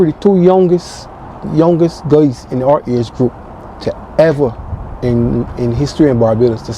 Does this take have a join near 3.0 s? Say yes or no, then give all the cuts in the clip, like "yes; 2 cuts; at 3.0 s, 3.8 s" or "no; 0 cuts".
no; 0 cuts